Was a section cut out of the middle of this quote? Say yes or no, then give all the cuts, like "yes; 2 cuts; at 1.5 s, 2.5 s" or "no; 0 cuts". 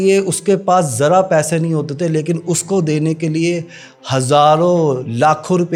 no; 0 cuts